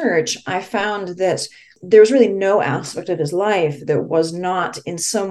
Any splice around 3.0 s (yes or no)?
no